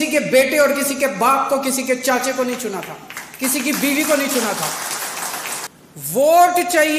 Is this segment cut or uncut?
cut